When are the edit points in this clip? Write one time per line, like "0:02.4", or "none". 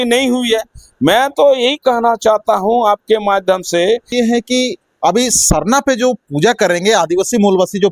0:04.1